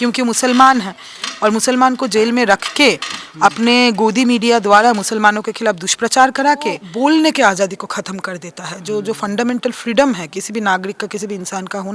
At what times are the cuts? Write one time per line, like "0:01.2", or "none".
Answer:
0:06.9